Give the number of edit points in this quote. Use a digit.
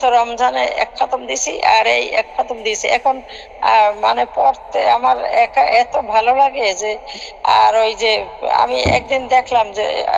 0